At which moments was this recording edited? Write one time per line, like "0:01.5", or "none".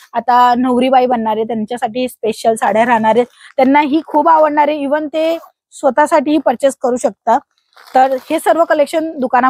none

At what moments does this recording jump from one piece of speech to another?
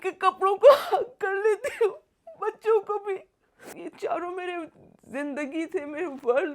0:03.7

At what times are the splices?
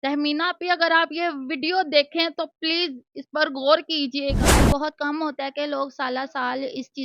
0:04.5

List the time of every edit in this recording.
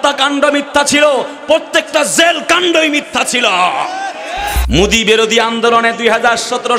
0:04.6

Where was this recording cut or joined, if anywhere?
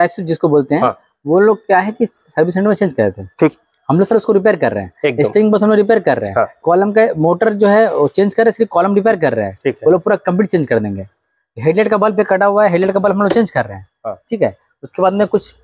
none

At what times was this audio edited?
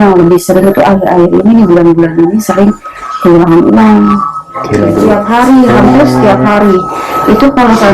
0:04.9

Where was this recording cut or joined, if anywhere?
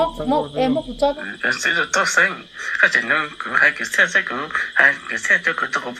0:01.2

